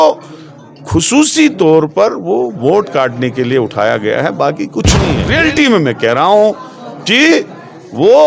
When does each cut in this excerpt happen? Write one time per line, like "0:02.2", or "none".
0:05.2